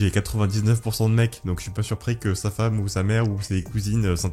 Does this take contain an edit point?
no; 0 cuts

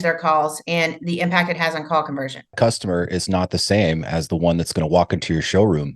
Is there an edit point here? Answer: yes; 1 cut; at 2.5 s

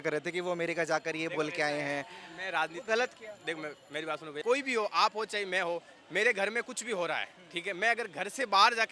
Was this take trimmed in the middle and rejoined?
yes; 1 cut; at 4.4 s

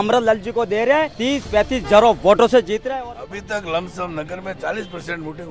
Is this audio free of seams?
no; 2 cuts; at 1.1 s, 2.8 s

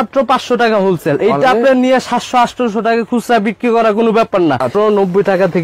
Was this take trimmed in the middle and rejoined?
yes; 1 cut; at 4.7 s

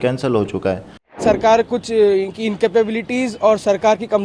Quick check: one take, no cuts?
no; 1 cut; at 1.1 s

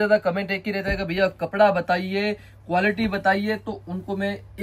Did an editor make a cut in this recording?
no; 0 cuts

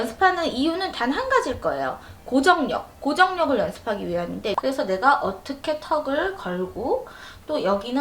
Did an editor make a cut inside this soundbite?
yes; 1 cut; at 4.6 s

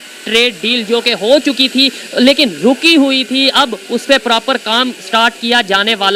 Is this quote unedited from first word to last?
yes; 0 cuts

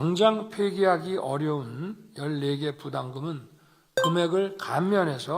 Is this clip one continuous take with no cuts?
yes; 0 cuts

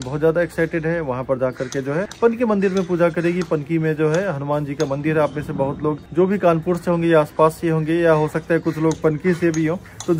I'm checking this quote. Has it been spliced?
no; 0 cuts

